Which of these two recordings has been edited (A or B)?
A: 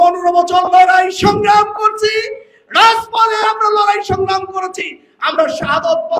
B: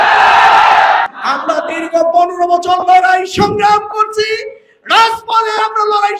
B